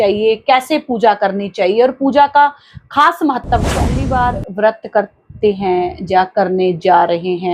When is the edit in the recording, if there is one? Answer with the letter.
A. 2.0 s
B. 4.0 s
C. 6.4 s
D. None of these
B